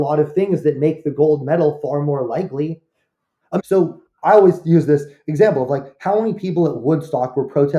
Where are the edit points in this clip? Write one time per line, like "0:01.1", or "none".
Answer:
0:03.6